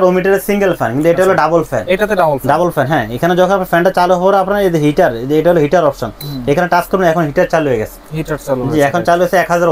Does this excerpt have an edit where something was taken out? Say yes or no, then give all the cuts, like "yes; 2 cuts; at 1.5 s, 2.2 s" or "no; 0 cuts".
no; 0 cuts